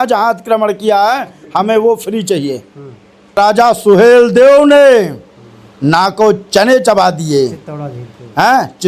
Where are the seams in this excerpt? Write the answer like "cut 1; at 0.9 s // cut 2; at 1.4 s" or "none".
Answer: cut 1; at 3.3 s